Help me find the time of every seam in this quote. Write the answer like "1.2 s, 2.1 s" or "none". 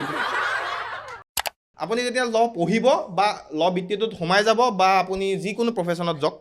1.4 s